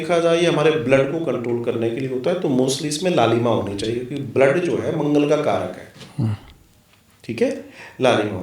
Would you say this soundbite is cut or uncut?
uncut